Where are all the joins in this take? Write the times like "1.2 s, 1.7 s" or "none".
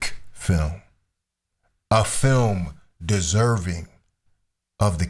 none